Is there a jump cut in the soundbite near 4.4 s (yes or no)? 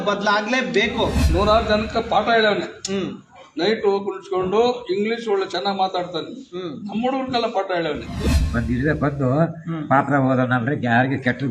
no